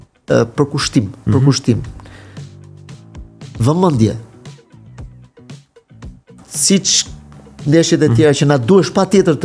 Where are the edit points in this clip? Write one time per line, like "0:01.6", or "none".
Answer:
none

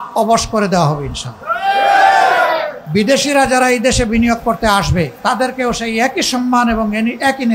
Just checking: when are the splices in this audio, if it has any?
0:02.8
0:05.1

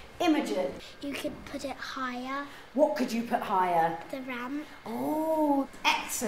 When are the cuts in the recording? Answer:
0:02.6

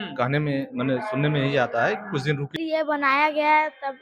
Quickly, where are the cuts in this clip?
0:02.5

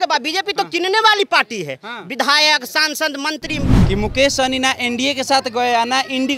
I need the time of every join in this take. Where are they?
0:03.8

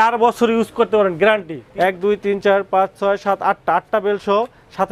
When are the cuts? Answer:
0:01.6

